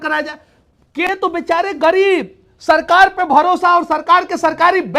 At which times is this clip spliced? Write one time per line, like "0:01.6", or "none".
0:01.1